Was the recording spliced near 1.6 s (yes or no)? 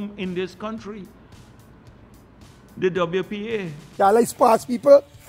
no